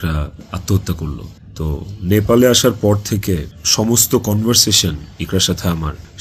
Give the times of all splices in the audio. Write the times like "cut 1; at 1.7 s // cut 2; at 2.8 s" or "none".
none